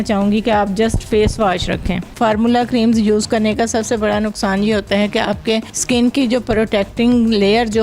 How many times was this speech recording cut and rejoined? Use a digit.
2